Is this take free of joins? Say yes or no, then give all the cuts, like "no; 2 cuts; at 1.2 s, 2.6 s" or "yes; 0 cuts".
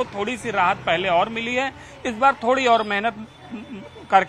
yes; 0 cuts